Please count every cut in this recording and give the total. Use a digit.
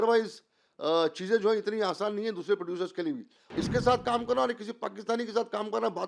1